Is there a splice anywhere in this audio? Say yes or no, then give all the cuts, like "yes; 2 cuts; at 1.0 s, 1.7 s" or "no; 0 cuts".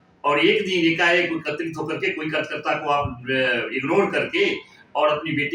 no; 0 cuts